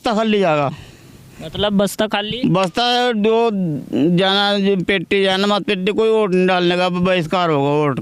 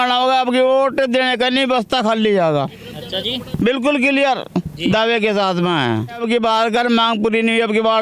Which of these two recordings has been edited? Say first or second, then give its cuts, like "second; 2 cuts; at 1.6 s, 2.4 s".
second; 1 cut; at 6.2 s